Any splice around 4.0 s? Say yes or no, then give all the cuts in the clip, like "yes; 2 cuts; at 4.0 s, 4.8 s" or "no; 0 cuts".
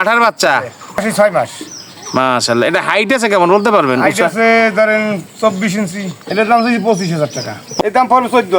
no; 3 cuts; at 1.0 s, 6.2 s, 7.6 s